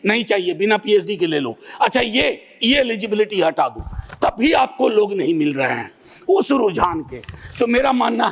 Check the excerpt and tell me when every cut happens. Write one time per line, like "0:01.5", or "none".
none